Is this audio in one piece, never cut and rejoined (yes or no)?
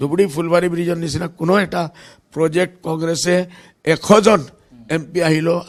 yes